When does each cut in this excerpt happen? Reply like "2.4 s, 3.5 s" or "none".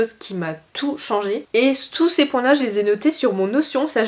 1.4 s